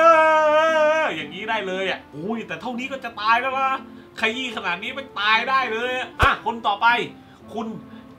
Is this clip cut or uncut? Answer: uncut